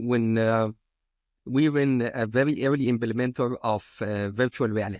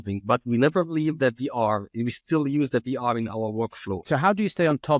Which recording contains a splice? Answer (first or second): second